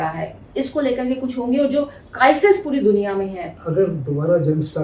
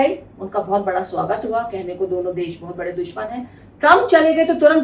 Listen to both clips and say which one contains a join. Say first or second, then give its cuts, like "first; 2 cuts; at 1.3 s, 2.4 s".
first; 1 cut; at 3.4 s